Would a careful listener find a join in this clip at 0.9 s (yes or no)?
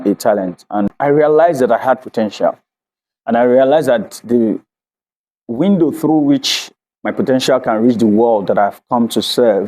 yes